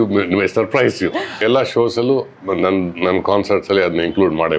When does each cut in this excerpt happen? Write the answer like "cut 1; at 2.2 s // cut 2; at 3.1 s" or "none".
cut 1; at 1.3 s